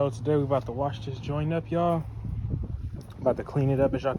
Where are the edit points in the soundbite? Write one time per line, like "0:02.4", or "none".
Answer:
none